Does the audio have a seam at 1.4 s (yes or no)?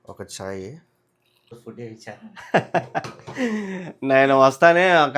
yes